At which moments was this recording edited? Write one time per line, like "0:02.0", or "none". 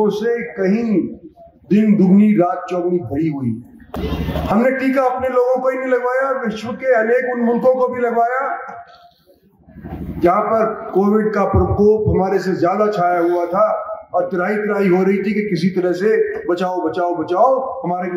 none